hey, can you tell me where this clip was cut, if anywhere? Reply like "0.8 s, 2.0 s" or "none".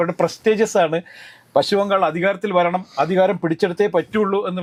none